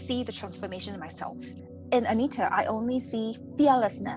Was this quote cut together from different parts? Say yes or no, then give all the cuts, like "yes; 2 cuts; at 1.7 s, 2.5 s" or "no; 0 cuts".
yes; 1 cut; at 1.6 s